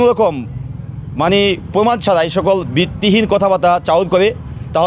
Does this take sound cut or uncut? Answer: uncut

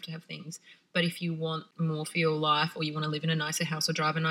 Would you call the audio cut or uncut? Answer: cut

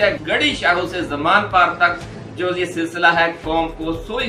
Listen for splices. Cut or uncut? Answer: uncut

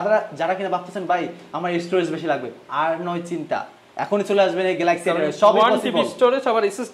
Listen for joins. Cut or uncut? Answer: uncut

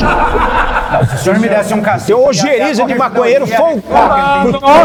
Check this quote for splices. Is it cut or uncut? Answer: uncut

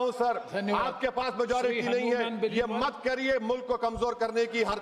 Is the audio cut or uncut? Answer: uncut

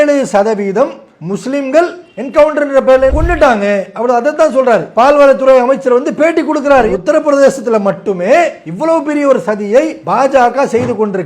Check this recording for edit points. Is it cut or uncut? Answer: cut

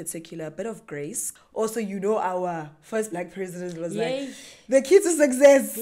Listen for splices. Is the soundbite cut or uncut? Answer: cut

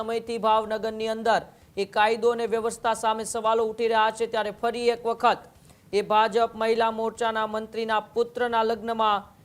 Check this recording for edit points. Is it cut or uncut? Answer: uncut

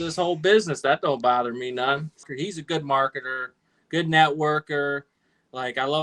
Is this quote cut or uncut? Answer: cut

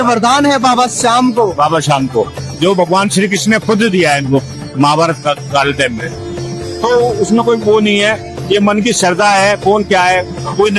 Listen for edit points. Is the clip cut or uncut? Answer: uncut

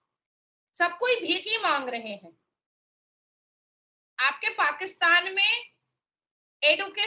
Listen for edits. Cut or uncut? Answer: uncut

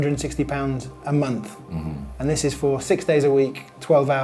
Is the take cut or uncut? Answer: uncut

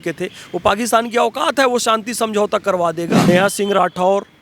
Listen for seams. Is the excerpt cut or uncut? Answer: cut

